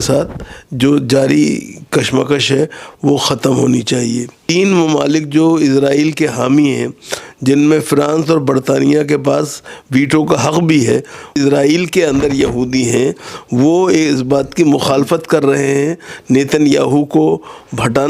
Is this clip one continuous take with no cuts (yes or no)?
no